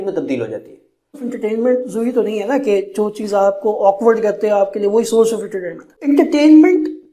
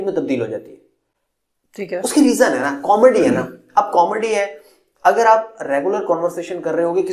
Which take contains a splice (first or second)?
first